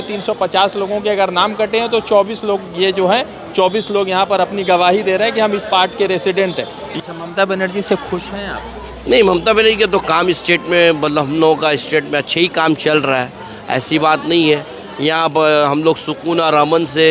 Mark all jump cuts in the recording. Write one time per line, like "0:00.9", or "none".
0:07.0